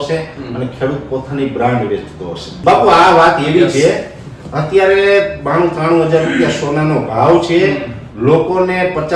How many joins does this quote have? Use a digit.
1